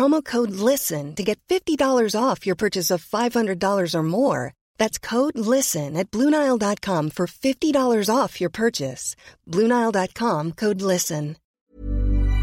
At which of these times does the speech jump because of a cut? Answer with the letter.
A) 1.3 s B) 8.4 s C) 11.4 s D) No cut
C